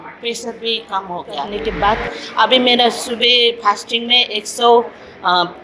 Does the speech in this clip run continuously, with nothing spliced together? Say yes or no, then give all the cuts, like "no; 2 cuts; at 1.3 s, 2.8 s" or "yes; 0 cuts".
no; 1 cut; at 1.5 s